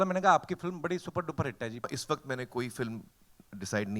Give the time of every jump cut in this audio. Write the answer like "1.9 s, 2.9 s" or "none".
1.9 s